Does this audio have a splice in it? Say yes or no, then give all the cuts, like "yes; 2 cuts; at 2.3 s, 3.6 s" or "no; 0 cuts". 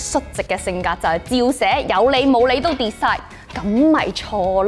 no; 0 cuts